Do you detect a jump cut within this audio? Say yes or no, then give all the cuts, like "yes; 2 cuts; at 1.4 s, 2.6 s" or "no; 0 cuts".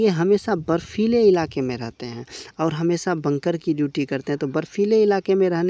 no; 0 cuts